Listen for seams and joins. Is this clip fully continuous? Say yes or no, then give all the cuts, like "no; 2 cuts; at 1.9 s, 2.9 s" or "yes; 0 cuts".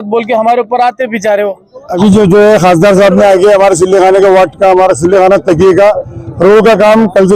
no; 1 cut; at 1.8 s